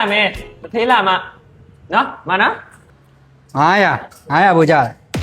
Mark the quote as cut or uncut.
cut